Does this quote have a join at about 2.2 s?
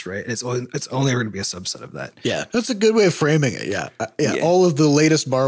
yes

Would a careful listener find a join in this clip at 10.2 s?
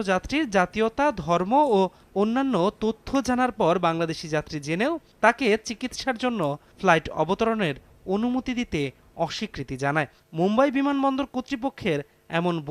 yes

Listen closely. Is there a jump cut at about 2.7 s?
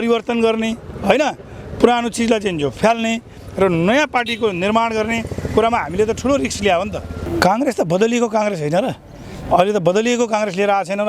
no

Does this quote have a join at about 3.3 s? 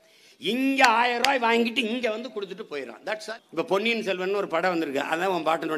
yes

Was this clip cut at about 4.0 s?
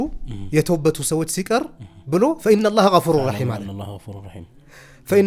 no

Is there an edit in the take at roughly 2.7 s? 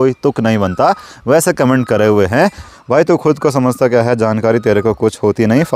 yes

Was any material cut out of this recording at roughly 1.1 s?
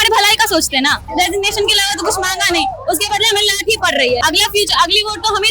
yes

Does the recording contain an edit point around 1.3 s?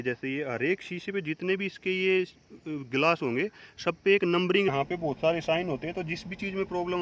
no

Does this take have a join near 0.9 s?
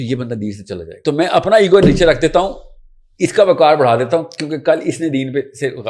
yes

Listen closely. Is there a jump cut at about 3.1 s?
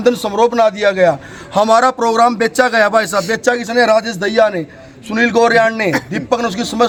no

